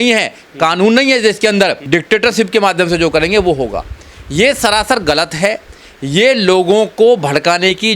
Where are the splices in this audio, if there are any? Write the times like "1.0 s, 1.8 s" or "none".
none